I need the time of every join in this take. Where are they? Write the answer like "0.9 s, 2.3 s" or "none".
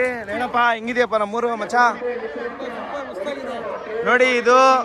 none